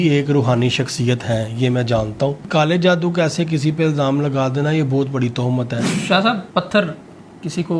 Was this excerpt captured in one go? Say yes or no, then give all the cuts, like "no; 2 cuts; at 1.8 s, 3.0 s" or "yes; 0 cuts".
no; 2 cuts; at 2.5 s, 5.9 s